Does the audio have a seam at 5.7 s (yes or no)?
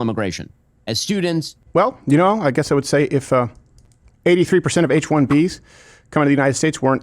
no